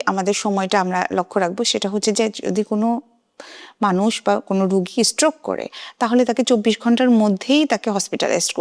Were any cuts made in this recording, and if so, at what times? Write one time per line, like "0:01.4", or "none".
none